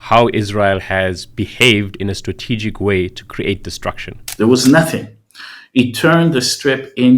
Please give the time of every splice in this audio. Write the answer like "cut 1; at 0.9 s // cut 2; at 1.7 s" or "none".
cut 1; at 4.2 s